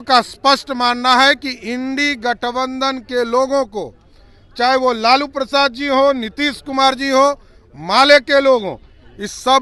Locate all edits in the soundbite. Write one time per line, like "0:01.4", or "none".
none